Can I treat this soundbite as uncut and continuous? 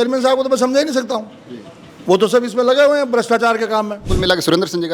no; 1 cut; at 4.0 s

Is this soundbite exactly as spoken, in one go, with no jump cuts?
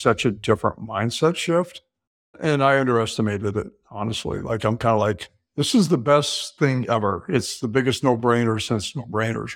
no; 1 cut; at 2.4 s

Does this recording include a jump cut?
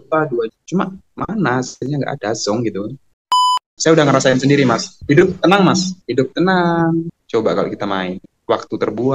yes; 4 cuts; at 3.6 s, 4.9 s, 6.0 s, 7.2 s

